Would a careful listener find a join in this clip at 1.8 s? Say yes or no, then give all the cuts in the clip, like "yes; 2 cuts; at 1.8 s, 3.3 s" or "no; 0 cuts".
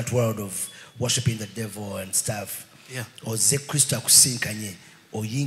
no; 0 cuts